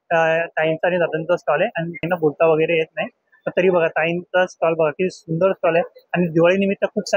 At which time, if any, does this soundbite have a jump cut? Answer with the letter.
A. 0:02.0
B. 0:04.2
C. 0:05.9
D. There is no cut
A